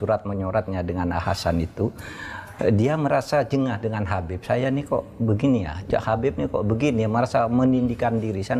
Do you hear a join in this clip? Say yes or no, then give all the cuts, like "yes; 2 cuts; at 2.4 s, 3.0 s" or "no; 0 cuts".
no; 0 cuts